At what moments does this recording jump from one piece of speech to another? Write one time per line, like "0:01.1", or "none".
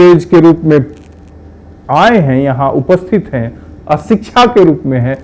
none